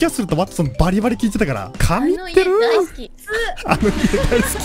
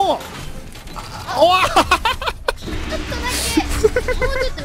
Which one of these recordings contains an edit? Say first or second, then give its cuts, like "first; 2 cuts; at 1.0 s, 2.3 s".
first; 1 cut; at 1.8 s